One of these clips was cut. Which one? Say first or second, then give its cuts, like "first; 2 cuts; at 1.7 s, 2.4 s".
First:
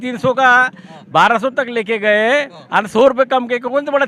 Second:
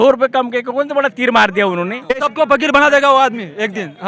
second; 1 cut; at 2.3 s